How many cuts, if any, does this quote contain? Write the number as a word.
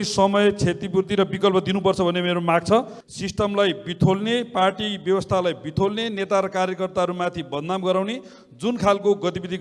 one